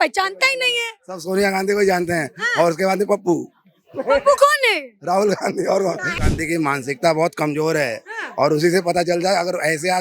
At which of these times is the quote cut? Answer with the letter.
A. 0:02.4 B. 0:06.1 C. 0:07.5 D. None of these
B